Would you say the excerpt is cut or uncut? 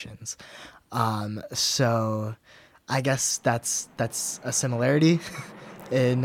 uncut